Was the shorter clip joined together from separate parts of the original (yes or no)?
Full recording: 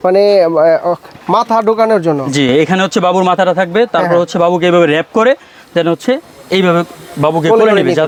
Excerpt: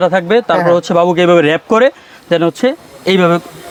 no